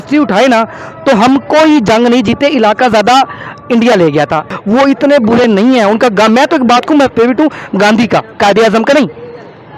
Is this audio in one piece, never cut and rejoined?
yes; 0 cuts

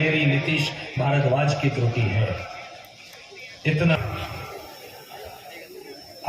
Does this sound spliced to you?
yes; 1 cut; at 4.0 s

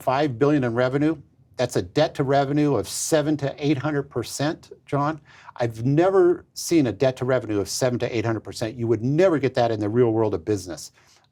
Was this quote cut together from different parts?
no; 0 cuts

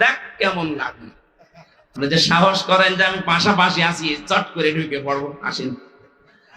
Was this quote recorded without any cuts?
no; 1 cut; at 2.0 s

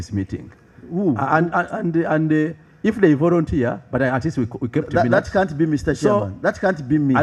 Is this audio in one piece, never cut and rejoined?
yes; 0 cuts

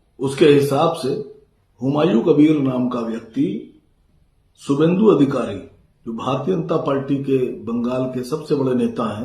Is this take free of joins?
yes; 0 cuts

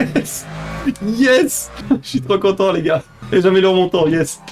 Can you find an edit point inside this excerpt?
yes; 2 cuts; at 1.7 s, 3.2 s

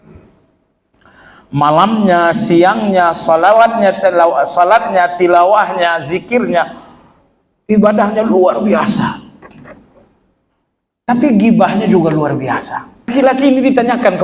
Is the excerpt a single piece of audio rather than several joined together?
no; 1 cut; at 13.1 s

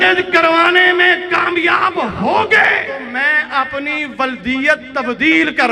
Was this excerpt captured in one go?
no; 1 cut; at 3.0 s

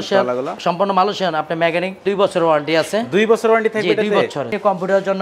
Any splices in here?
yes; 2 cuts; at 2.0 s, 4.5 s

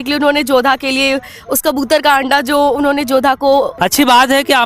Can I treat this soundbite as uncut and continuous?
no; 1 cut; at 3.7 s

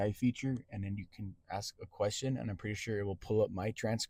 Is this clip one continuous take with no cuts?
yes; 0 cuts

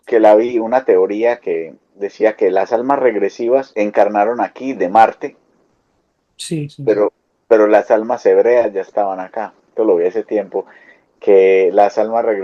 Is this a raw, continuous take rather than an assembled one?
no; 2 cuts; at 3.7 s, 9.7 s

